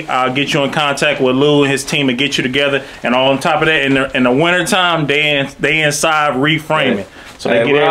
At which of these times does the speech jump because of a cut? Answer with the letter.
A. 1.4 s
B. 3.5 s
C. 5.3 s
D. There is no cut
D